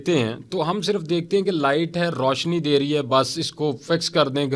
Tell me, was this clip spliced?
no; 0 cuts

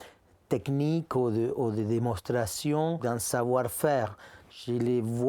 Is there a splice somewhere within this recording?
yes; 1 cut; at 3.0 s

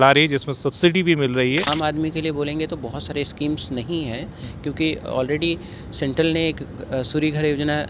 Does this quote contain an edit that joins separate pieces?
yes; 1 cut; at 1.7 s

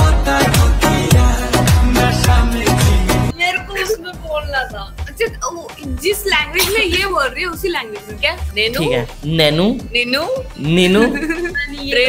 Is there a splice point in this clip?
no; 0 cuts

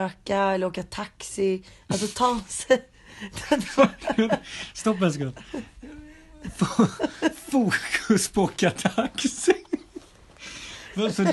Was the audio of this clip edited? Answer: no; 0 cuts

